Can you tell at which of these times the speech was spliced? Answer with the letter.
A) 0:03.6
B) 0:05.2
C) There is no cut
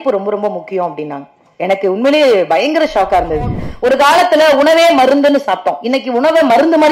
A